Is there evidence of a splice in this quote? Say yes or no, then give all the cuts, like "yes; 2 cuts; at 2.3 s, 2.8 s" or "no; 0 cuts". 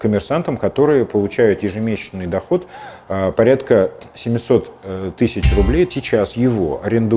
yes; 1 cut; at 5.9 s